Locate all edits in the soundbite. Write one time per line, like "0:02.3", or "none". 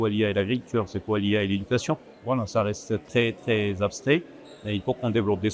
0:02.1